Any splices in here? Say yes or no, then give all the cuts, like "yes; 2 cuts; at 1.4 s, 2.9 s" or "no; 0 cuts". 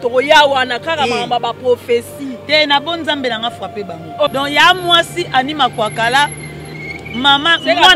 yes; 1 cut; at 4.3 s